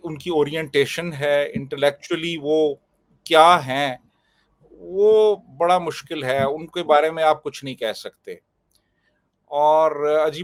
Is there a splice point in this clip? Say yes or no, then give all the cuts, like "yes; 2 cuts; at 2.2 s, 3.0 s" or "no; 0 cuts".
no; 0 cuts